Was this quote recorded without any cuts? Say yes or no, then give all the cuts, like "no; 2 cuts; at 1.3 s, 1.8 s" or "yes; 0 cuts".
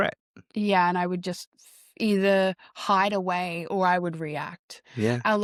yes; 0 cuts